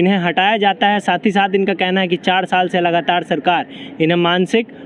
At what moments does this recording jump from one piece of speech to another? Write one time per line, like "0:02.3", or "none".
none